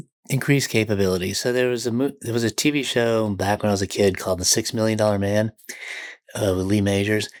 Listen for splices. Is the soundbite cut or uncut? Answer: uncut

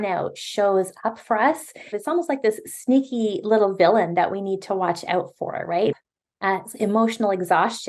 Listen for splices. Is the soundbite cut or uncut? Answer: cut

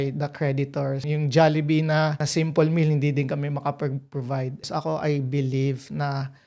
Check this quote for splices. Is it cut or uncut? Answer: cut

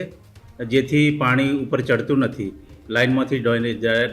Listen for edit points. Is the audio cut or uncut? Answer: cut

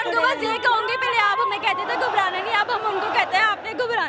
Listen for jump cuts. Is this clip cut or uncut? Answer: uncut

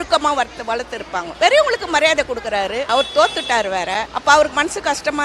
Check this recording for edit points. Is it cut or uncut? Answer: cut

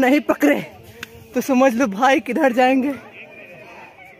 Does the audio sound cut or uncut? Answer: uncut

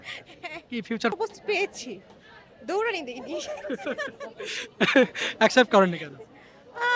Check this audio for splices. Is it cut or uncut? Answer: cut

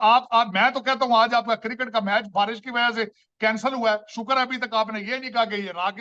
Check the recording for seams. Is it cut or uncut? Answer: uncut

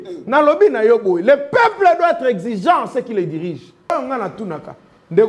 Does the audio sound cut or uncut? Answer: cut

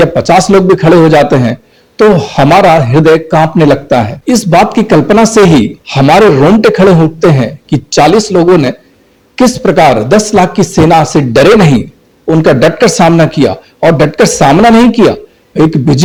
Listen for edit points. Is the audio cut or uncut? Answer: uncut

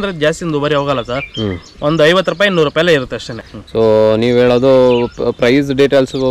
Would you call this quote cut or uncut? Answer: uncut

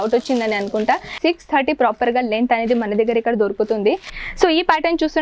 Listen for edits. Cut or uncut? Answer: cut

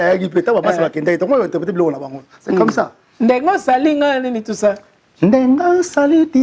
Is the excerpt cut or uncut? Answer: uncut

